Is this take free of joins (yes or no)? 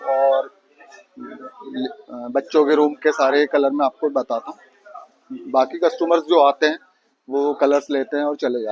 yes